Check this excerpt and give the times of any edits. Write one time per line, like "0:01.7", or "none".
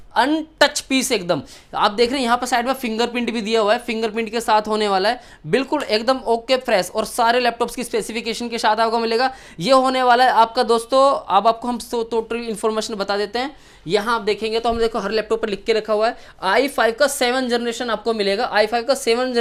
none